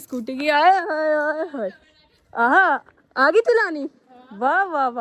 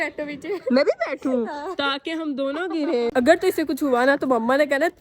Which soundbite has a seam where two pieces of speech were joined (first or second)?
second